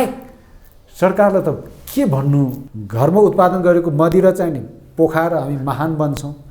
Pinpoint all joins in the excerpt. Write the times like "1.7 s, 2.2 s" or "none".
2.6 s